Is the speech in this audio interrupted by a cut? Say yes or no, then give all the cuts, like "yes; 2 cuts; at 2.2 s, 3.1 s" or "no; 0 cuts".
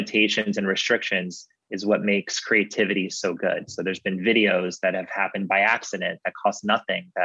no; 0 cuts